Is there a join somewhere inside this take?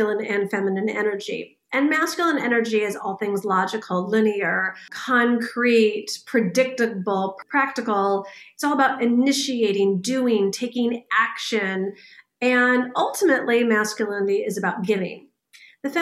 yes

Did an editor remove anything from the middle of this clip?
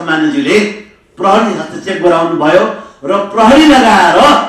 no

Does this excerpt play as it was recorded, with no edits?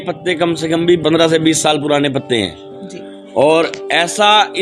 no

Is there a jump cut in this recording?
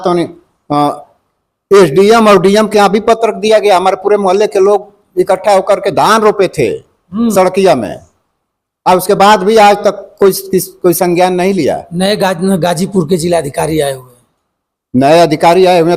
no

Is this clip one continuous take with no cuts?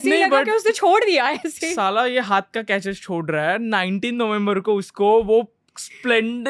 yes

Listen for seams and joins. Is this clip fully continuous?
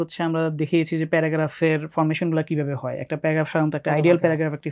yes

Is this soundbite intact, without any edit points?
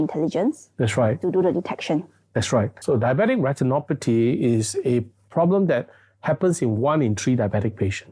no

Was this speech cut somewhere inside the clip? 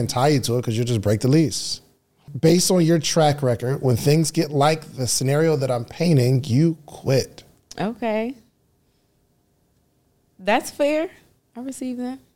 yes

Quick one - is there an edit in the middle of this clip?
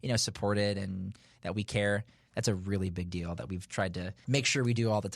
yes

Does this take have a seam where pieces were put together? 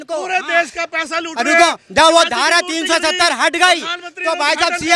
no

